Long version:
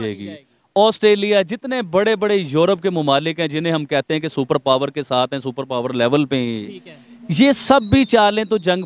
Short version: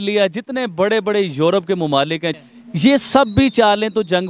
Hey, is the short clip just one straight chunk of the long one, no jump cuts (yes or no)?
no